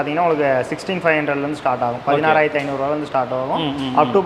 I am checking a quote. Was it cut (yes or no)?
no